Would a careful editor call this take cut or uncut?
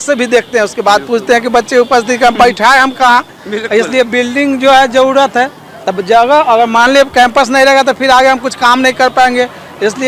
uncut